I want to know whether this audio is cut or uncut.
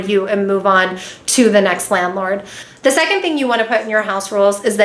uncut